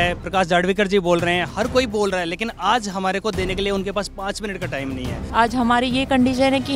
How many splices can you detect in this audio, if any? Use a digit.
1